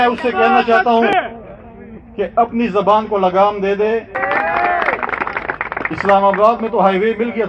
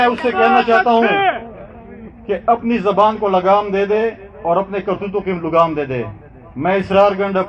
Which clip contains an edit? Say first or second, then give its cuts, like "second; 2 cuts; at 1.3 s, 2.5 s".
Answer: first; 2 cuts; at 1.1 s, 4.2 s